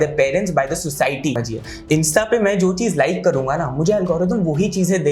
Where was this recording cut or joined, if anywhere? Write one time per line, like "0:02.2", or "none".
0:01.5